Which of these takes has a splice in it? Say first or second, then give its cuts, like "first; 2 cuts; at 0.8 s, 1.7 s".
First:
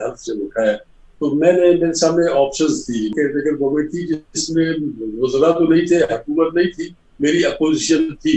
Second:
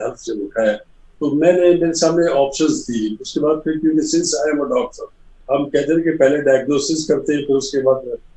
first; 1 cut; at 3.1 s